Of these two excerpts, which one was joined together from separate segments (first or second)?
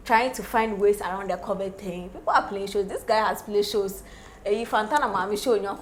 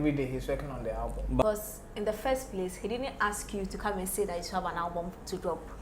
second